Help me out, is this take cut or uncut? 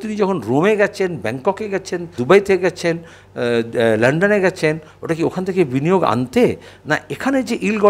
cut